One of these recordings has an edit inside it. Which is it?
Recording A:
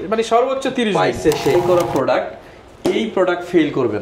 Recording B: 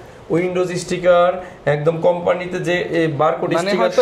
A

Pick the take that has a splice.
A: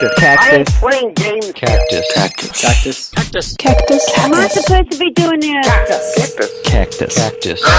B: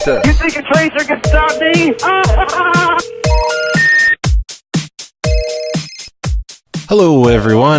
B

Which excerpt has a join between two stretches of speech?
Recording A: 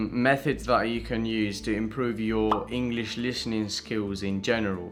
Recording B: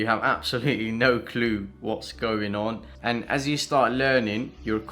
B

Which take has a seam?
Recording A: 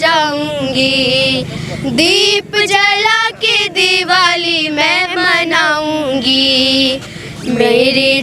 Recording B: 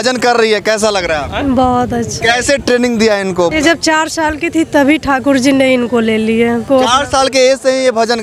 B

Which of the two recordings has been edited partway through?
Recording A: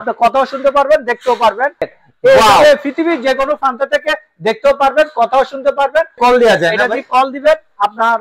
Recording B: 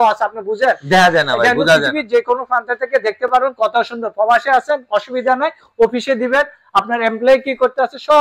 A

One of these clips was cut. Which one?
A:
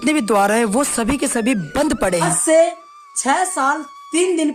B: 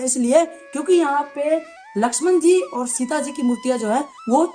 A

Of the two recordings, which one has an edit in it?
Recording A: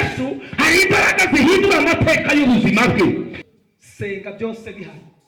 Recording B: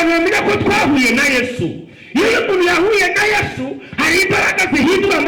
A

